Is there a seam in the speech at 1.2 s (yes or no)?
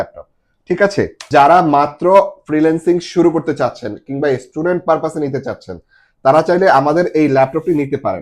yes